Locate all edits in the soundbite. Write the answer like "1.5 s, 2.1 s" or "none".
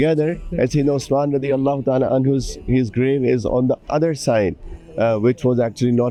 none